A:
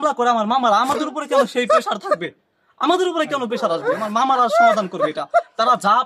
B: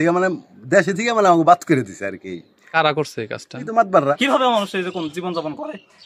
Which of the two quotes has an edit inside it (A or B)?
B